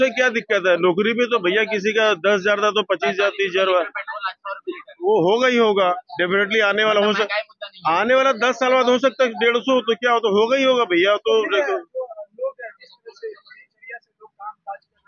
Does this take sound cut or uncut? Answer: uncut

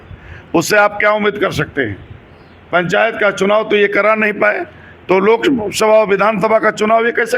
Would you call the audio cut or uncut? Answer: uncut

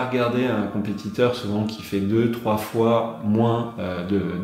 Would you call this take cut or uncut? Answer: uncut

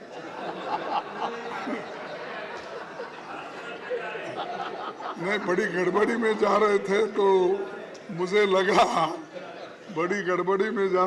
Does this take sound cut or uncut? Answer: uncut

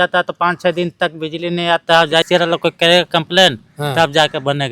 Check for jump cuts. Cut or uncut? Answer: cut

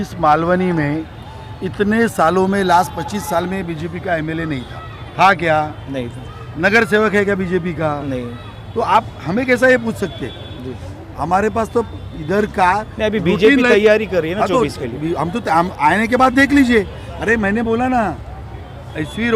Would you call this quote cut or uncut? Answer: uncut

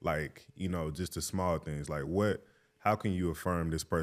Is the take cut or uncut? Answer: uncut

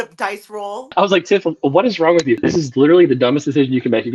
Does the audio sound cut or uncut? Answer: cut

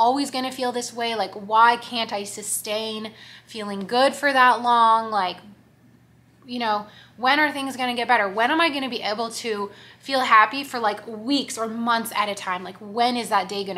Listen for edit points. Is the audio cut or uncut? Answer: uncut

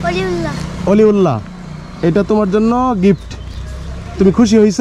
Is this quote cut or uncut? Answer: uncut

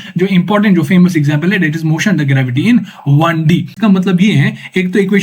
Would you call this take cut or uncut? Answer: cut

